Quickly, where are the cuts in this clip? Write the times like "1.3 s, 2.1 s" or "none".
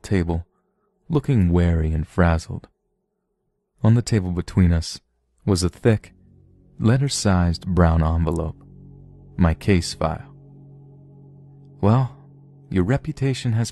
none